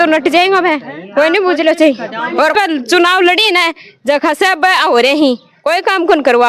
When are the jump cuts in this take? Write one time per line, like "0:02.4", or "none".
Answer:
0:02.5